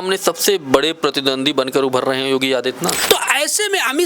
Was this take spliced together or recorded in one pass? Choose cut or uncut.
cut